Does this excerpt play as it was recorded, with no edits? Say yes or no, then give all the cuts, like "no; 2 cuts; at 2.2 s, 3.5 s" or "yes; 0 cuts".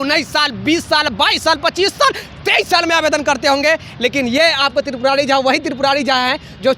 yes; 0 cuts